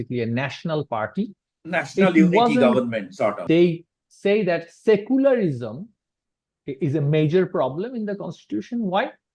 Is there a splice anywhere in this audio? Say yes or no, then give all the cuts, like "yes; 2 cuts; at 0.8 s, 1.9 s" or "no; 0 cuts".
yes; 1 cut; at 3.4 s